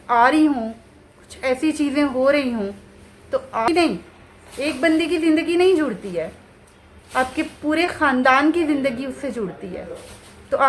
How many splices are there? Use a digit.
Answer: 1